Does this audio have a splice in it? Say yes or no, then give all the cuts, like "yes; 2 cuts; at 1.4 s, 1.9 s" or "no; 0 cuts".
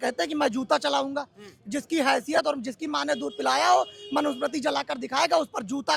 no; 0 cuts